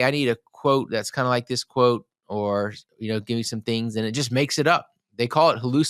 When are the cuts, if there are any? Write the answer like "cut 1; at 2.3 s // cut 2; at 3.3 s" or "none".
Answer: none